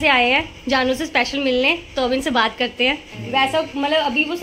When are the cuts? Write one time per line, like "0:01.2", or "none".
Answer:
0:03.1